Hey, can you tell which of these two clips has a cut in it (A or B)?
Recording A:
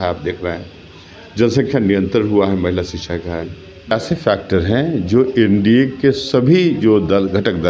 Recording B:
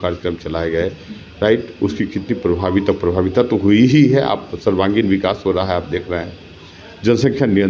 A